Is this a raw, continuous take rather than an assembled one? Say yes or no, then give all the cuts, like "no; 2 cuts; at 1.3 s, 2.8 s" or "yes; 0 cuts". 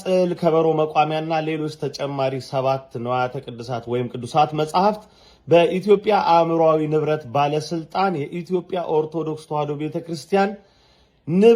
yes; 0 cuts